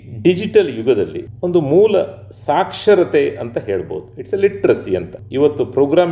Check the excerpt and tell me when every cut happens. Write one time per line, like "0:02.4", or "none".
0:01.2
0:05.2